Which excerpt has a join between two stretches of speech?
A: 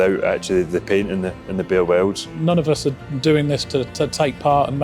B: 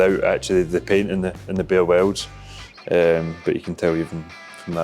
A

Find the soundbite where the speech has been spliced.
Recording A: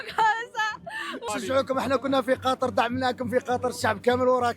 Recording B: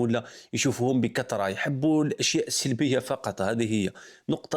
A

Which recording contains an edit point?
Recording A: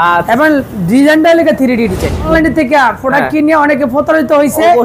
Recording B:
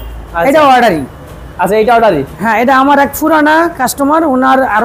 A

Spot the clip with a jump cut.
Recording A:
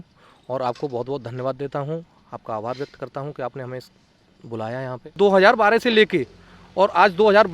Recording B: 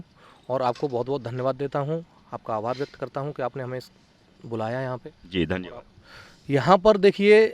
A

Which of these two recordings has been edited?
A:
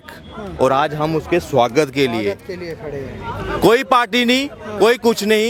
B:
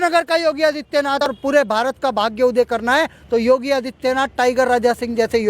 B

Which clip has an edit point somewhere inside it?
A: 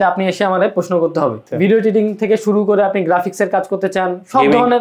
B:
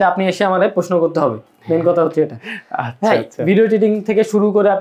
A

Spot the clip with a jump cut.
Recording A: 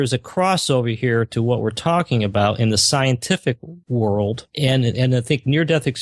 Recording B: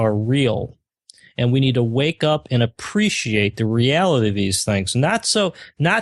A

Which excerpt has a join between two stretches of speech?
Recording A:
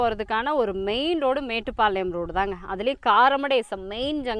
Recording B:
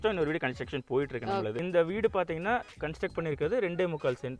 B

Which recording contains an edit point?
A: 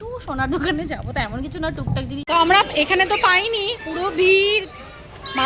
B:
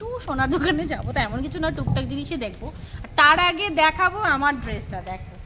A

